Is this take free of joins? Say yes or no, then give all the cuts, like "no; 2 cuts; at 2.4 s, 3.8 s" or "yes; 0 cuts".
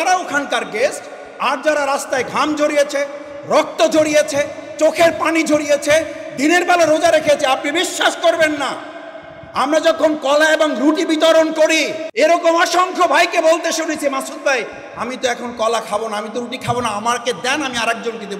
no; 1 cut; at 12.0 s